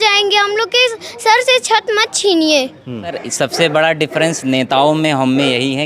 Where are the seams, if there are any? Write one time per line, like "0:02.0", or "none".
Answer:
0:03.2